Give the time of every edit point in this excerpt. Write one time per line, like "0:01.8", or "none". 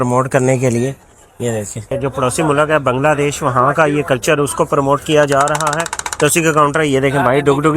0:01.9